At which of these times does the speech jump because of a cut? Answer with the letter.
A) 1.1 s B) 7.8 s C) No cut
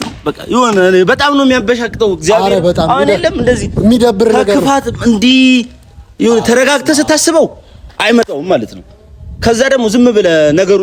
C